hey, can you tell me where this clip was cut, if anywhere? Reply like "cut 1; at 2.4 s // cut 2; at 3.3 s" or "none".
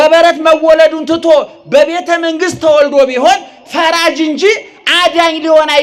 none